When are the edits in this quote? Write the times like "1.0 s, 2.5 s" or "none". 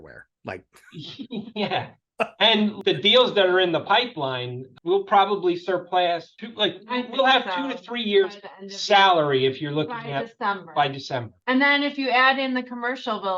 none